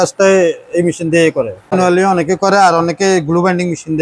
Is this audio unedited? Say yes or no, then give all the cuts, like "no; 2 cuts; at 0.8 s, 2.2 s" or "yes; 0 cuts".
no; 1 cut; at 2.0 s